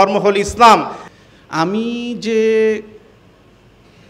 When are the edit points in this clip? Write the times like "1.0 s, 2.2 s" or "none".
1.0 s